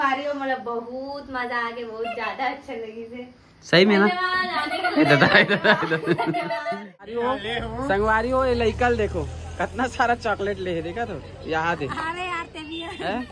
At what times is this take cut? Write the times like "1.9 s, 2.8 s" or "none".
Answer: 7.1 s